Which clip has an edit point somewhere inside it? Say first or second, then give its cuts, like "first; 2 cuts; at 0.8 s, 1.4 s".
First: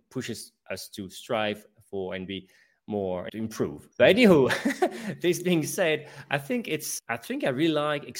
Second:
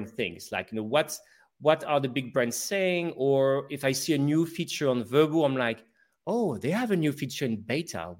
first; 2 cuts; at 3.7 s, 6.9 s